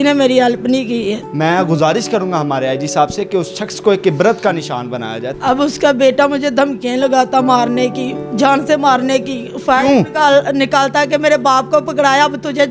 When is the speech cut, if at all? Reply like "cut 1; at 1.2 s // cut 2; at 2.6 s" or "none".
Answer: cut 1; at 1.2 s // cut 2; at 5.3 s